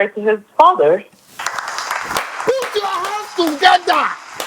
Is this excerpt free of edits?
yes; 0 cuts

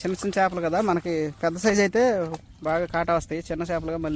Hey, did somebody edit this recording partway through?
no; 0 cuts

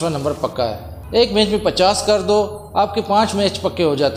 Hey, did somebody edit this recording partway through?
yes; 1 cut; at 1.0 s

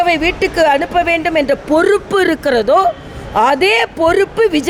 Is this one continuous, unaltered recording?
yes; 0 cuts

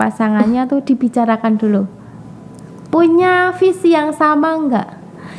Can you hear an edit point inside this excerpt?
no; 0 cuts

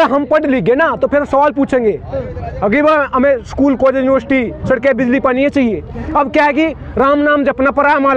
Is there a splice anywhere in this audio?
no; 0 cuts

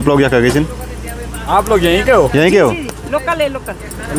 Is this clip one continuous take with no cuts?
yes; 0 cuts

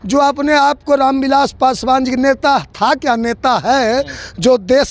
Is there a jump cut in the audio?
no; 0 cuts

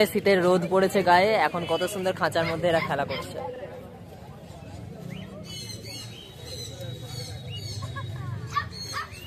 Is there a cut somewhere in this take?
no; 0 cuts

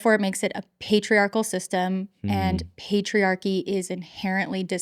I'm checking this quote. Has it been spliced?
no; 0 cuts

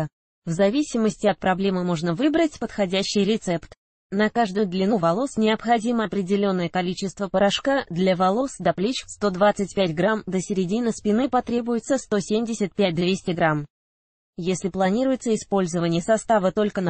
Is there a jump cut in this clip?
no; 0 cuts

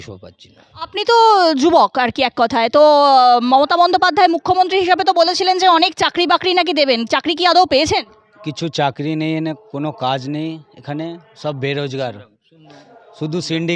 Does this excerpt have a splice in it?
no; 0 cuts

